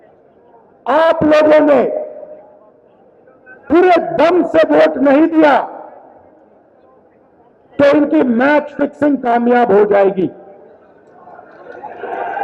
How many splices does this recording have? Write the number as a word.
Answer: zero